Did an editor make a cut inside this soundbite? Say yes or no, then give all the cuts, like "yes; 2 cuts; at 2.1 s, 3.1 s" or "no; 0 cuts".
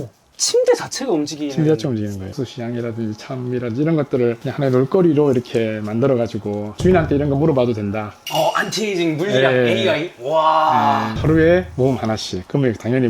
yes; 2 cuts; at 2.3 s, 11.1 s